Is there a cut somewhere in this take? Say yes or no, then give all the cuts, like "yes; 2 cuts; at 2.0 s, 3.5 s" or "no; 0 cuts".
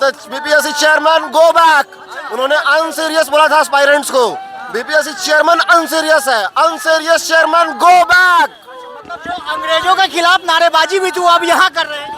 no; 0 cuts